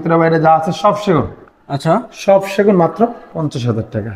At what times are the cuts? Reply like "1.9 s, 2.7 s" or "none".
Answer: none